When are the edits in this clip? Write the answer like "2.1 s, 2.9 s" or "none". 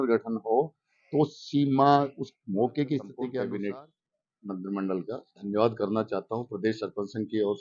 3.3 s

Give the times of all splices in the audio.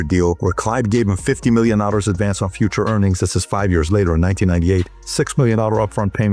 none

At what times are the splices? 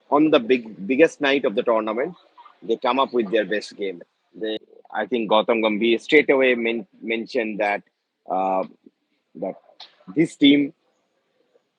4.5 s

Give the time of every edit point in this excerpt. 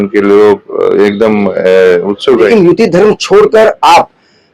2.5 s

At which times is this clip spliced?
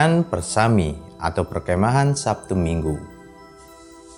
none

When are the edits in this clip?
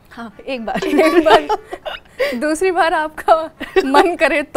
none

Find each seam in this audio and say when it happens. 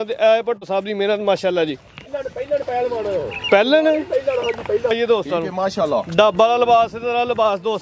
2.0 s, 4.9 s

